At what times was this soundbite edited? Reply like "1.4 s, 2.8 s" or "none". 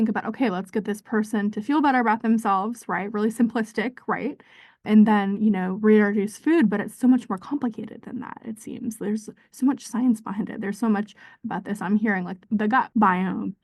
none